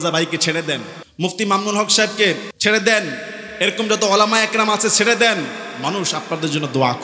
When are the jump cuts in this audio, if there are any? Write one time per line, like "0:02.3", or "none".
0:01.0
0:02.5